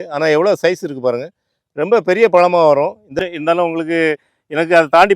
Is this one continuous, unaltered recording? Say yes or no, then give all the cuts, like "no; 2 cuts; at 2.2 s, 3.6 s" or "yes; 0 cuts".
no; 1 cut; at 3.1 s